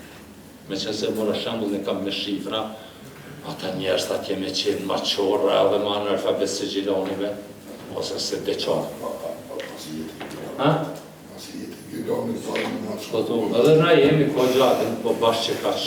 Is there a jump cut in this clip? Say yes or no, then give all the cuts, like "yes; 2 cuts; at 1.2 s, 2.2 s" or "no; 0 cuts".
no; 0 cuts